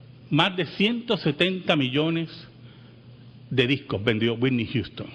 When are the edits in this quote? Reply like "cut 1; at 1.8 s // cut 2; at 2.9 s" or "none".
cut 1; at 2.3 s

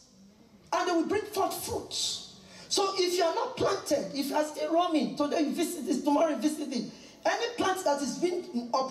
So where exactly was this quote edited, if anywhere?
none

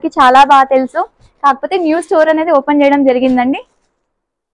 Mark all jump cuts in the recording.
none

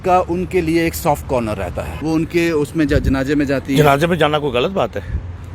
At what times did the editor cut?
cut 1; at 1.9 s

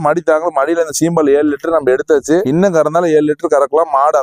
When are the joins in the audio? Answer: none

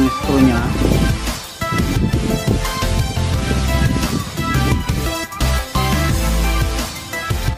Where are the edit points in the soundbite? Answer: none

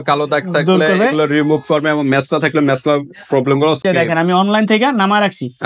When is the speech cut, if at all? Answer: cut 1; at 3.8 s

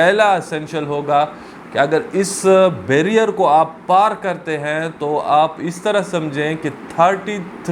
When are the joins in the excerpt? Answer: none

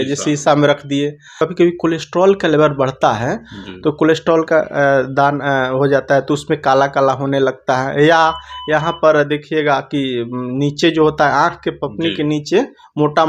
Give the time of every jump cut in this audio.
cut 1; at 1.3 s

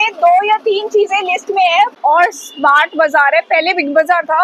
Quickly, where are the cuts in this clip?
cut 1; at 1.9 s

